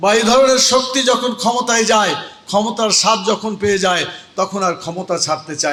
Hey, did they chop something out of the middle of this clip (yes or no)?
no